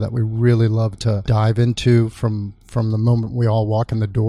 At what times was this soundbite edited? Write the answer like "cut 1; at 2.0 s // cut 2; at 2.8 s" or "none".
cut 1; at 1.3 s